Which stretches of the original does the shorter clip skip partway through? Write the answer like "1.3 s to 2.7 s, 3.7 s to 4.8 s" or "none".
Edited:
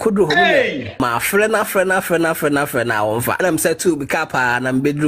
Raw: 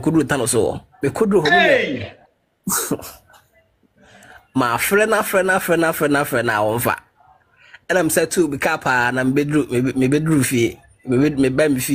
2.1 s to 4.5 s, 6.9 s to 7.9 s